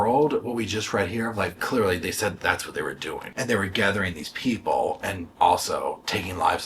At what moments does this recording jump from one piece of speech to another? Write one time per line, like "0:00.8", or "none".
0:01.6
0:03.3